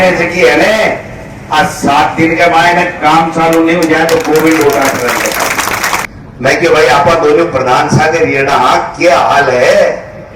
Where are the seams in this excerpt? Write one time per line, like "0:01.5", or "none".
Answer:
0:06.0